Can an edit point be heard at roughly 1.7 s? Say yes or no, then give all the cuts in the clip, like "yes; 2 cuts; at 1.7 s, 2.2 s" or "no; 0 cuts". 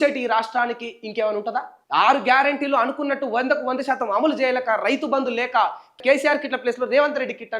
yes; 2 cuts; at 1.7 s, 5.9 s